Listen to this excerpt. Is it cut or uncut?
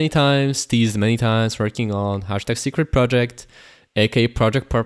uncut